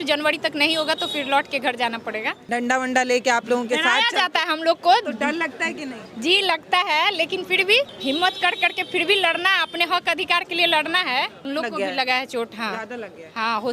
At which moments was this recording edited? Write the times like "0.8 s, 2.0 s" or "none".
2.5 s, 7.9 s, 11.5 s